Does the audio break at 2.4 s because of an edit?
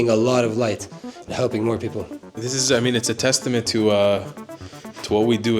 yes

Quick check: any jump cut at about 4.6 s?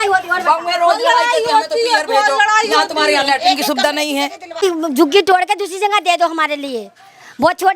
yes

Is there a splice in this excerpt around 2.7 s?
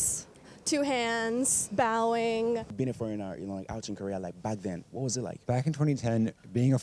yes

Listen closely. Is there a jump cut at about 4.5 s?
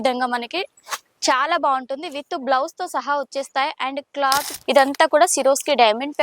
yes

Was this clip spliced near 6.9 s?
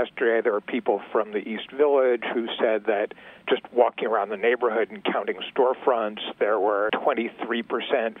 yes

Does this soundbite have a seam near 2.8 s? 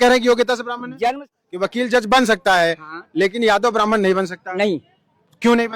no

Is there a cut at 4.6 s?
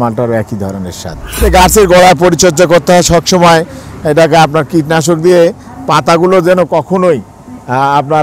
no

